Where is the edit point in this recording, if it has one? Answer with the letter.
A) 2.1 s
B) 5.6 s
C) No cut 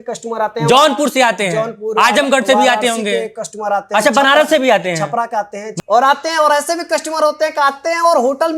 B